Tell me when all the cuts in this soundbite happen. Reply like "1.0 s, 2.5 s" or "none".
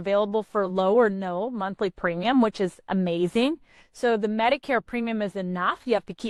none